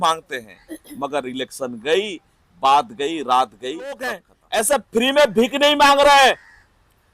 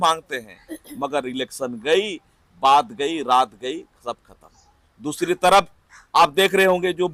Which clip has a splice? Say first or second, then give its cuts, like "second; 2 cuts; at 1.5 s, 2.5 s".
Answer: first; 1 cut; at 4.3 s